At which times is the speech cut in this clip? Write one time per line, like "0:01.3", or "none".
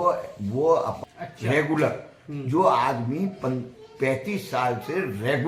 0:01.0